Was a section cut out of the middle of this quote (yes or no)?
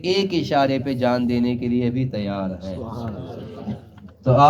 no